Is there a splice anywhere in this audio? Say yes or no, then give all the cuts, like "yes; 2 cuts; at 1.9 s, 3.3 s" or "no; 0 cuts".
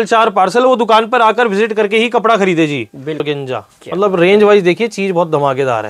yes; 1 cut; at 3.2 s